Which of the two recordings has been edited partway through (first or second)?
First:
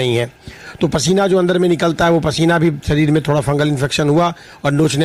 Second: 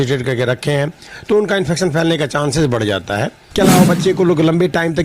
second